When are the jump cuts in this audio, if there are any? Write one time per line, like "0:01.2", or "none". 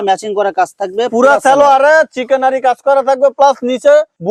none